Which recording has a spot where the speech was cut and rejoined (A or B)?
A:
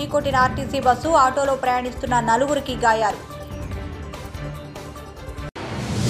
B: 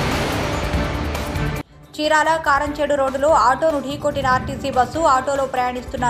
B